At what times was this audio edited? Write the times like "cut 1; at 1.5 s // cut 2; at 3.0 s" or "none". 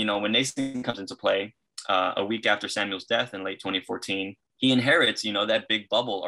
cut 1; at 4.4 s